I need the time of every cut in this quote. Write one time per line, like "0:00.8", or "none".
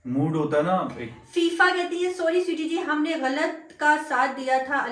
none